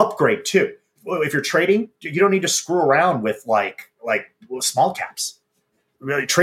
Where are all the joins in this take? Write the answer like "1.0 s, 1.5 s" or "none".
1.0 s